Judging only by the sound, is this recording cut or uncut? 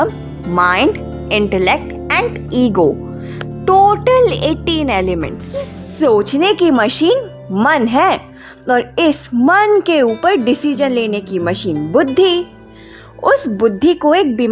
cut